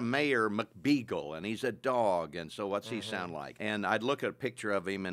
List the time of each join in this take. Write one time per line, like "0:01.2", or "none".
0:03.5